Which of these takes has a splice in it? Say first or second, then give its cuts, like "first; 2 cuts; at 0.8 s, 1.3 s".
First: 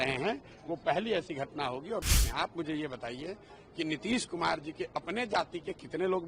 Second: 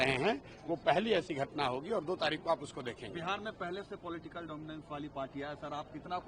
first; 1 cut; at 2.0 s